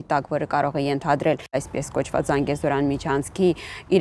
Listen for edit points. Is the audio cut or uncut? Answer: cut